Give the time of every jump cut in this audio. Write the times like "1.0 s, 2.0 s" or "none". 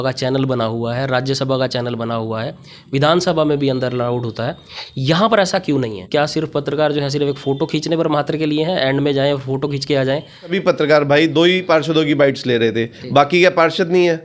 6.0 s, 10.6 s